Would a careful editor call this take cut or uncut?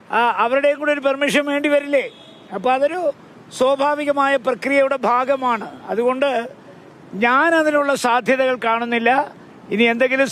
uncut